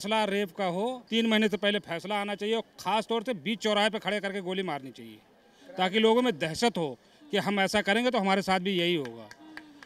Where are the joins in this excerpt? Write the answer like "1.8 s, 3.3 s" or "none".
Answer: 1.0 s